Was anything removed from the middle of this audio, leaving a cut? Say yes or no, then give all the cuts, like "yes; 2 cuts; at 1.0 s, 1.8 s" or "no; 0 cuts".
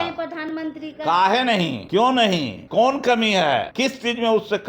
yes; 3 cuts; at 1.8 s, 2.6 s, 3.7 s